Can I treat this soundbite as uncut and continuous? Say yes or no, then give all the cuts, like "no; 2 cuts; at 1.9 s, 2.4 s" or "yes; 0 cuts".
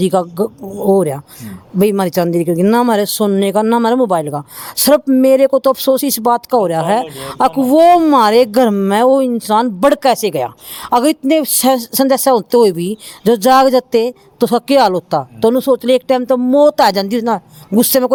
yes; 0 cuts